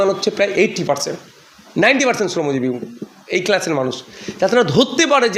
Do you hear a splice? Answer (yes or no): no